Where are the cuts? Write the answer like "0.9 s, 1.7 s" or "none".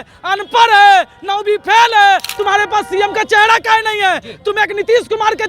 2.3 s